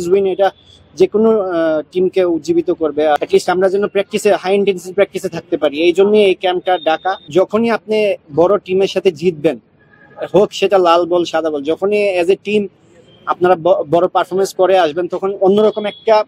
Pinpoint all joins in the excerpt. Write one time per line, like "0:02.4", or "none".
0:03.2
0:07.3